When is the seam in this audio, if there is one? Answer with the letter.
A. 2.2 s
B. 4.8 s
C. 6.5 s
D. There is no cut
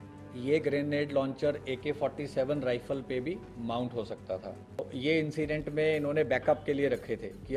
B